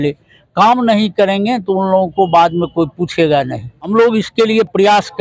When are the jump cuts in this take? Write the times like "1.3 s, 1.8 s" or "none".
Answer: 3.9 s